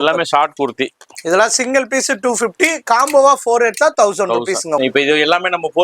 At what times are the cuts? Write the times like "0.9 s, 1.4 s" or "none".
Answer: 4.8 s